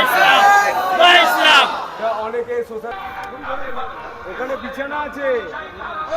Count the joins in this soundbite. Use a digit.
1